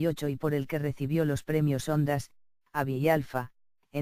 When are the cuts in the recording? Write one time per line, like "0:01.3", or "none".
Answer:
none